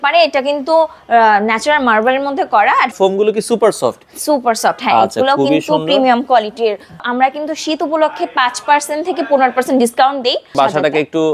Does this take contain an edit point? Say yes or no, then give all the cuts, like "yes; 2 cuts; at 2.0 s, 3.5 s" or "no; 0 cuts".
yes; 3 cuts; at 2.9 s, 7.0 s, 10.6 s